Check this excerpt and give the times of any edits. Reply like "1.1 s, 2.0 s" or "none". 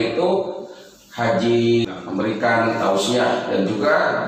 none